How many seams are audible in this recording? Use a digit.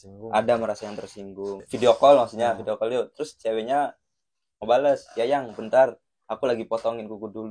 1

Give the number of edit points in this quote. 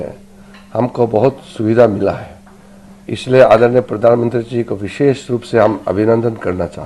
0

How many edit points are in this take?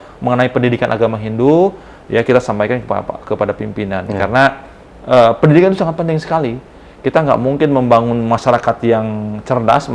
0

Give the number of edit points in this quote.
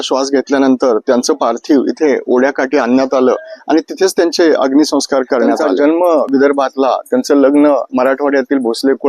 1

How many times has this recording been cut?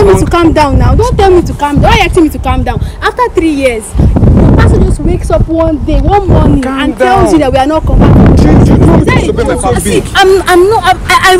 1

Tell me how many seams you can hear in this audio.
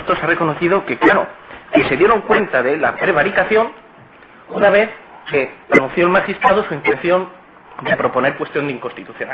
0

